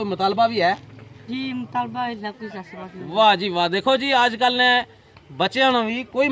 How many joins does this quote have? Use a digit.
0